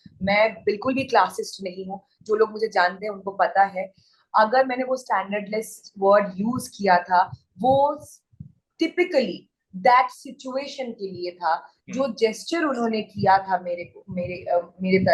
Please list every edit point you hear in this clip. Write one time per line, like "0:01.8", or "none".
none

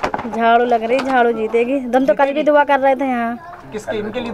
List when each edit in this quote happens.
none

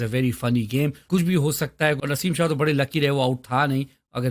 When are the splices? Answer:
0:01.0
0:02.0

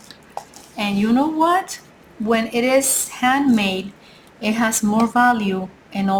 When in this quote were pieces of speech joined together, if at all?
none

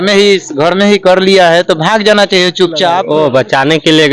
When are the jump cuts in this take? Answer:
0:03.0

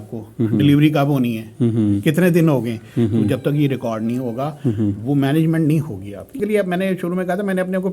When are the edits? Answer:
0:06.3

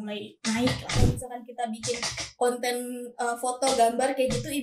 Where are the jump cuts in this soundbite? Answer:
0:01.0

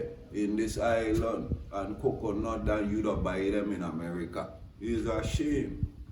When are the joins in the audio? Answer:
0:04.6

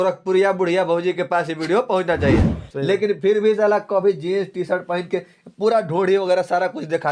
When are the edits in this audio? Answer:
0:02.6

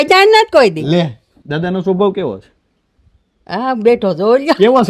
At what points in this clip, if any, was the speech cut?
0:01.4

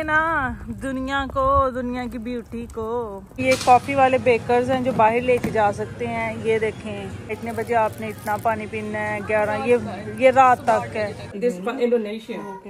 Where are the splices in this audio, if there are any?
0:03.4
0:07.4
0:11.3

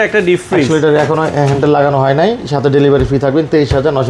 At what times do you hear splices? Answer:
none

